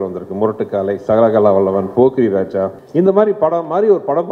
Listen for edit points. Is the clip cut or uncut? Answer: cut